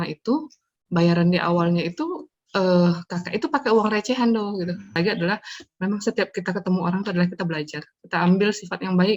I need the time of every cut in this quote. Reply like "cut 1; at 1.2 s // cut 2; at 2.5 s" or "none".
cut 1; at 5.0 s